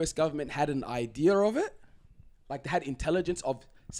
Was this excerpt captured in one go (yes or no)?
yes